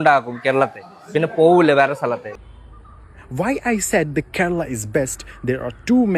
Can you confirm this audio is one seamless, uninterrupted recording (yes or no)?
no